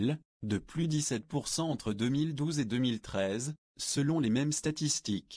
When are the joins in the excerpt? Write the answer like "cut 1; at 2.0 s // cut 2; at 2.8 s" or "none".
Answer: cut 1; at 1.0 s